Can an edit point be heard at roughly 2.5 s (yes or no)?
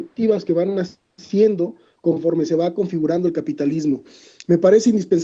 yes